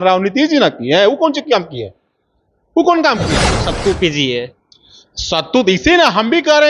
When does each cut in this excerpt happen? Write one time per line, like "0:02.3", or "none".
0:03.6